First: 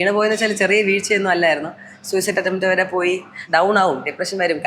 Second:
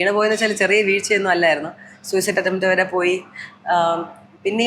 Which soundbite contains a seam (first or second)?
first